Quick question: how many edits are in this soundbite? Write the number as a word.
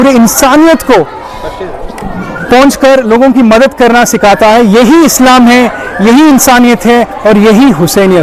zero